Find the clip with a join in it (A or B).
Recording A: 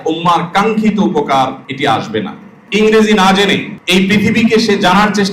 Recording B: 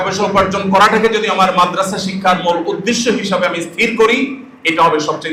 A